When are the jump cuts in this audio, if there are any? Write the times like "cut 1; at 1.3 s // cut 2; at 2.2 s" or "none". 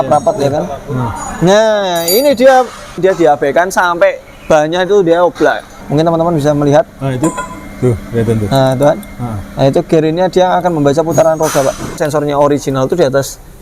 cut 1; at 3.0 s // cut 2; at 5.8 s // cut 3; at 12.0 s

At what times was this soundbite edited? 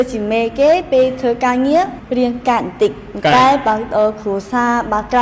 cut 1; at 2.0 s

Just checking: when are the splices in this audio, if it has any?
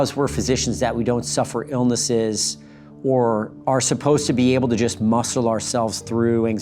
none

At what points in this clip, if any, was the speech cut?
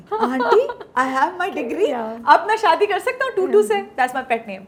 none

